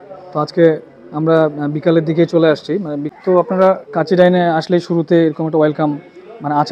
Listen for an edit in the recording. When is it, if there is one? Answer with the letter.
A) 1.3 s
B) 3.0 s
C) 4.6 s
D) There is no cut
B